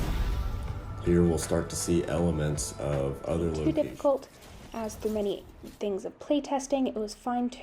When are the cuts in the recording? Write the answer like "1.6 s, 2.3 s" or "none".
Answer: 3.6 s